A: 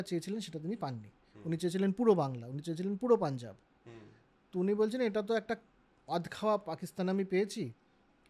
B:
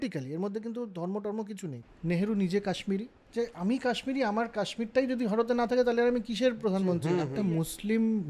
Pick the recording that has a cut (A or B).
B